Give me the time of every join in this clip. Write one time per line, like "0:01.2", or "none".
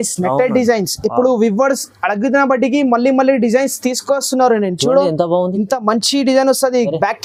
none